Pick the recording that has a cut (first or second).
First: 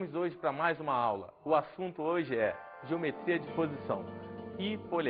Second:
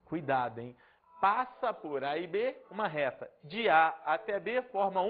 first